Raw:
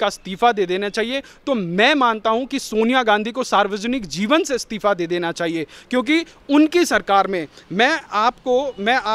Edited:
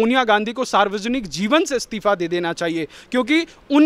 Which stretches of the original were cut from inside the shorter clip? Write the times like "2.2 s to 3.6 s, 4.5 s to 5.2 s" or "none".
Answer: none